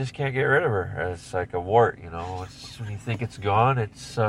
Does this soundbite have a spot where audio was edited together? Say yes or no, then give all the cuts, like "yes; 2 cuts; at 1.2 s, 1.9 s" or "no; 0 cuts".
no; 0 cuts